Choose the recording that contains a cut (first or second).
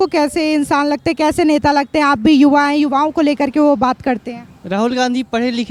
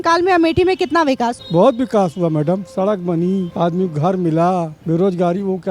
second